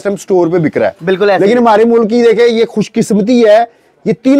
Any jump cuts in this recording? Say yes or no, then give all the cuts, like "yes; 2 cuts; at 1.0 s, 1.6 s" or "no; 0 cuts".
no; 0 cuts